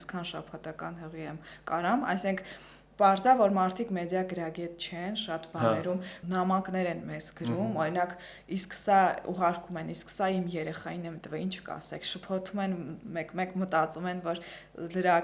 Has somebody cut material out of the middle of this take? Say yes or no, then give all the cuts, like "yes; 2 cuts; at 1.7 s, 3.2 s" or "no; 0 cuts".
yes; 1 cut; at 6.1 s